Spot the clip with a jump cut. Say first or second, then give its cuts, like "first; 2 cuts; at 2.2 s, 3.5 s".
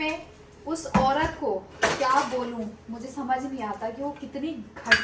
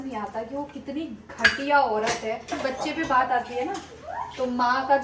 second; 1 cut; at 2.6 s